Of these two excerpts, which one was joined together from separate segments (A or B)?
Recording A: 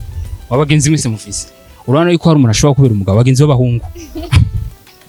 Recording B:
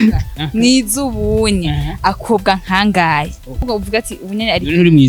B